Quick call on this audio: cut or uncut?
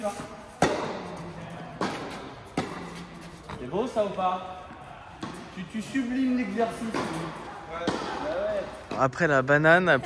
cut